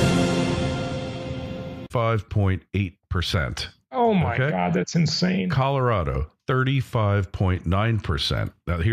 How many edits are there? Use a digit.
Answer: 0